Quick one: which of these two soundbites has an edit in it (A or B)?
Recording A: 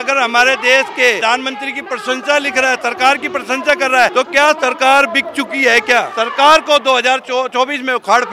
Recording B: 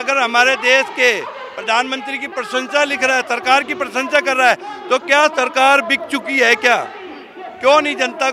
A